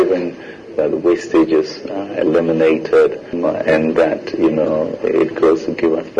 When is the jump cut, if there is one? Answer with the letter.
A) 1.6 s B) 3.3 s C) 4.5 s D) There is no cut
B